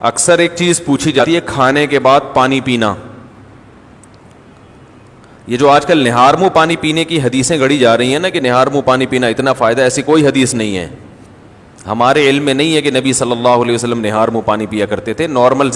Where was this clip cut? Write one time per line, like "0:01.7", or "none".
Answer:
0:01.2